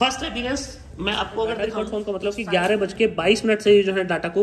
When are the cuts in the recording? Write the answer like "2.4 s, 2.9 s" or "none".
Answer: 1.8 s